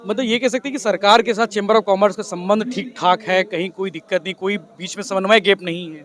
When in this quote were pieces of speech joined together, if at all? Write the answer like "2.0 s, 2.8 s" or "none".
none